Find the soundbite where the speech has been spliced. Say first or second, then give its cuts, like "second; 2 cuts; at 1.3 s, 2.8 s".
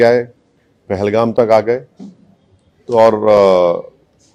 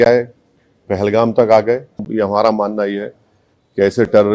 second; 1 cut; at 2.1 s